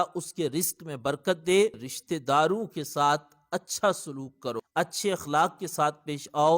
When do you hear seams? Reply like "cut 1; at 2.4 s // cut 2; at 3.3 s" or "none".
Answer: cut 1; at 1.9 s // cut 2; at 4.6 s